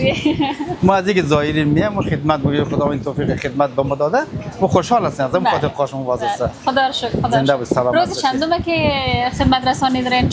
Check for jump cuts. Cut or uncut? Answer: uncut